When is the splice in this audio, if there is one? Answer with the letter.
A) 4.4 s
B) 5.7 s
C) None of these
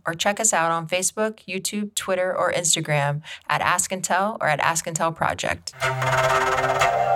B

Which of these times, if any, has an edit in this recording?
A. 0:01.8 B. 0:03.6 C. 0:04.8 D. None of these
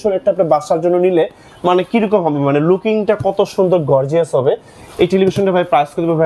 D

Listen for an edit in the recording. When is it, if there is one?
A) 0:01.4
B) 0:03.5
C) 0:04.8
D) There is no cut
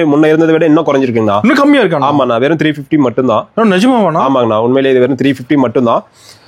D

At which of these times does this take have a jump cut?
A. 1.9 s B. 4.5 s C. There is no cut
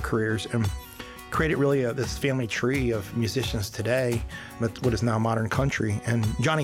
B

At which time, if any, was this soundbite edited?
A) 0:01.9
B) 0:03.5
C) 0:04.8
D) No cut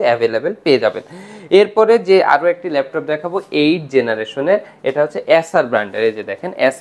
D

